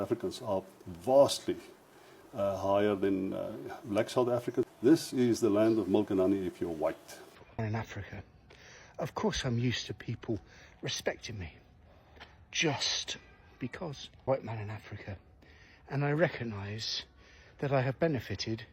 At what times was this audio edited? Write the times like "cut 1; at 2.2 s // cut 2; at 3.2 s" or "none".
cut 1; at 4.7 s // cut 2; at 7.4 s